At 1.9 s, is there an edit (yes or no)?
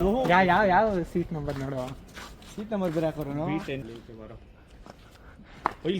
no